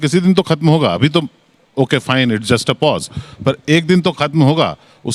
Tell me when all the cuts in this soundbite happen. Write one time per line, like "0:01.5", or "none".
none